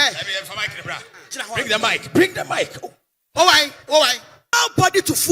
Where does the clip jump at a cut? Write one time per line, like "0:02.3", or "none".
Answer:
0:04.4